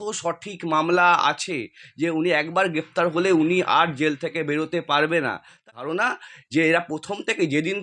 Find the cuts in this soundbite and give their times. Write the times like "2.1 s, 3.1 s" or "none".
5.7 s